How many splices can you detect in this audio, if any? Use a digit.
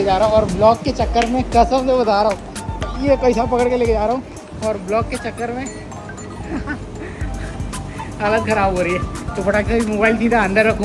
0